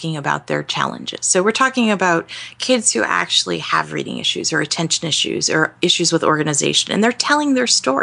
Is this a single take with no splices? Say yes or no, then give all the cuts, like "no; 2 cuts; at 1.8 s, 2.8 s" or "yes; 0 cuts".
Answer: yes; 0 cuts